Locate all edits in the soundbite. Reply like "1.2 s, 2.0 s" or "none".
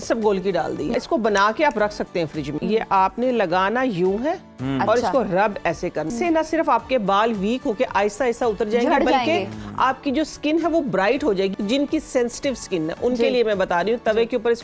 0.9 s, 2.5 s, 6.1 s, 11.5 s